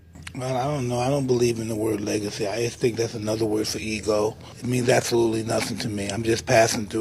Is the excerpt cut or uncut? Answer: cut